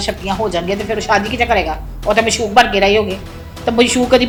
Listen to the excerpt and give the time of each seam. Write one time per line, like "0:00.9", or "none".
none